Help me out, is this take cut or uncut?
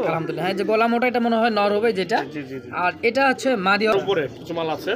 cut